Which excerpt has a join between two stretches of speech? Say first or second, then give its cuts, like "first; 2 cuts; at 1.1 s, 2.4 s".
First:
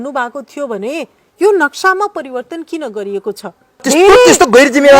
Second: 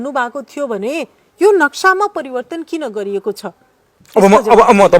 first; 1 cut; at 3.8 s